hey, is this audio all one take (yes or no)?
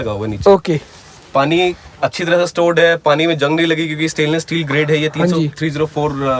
yes